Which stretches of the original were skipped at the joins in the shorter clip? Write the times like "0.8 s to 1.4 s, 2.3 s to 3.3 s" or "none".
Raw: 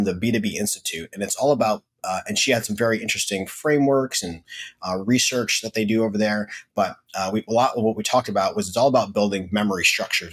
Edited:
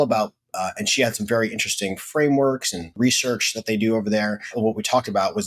4.4 s to 5.0 s, 6.6 s to 7.7 s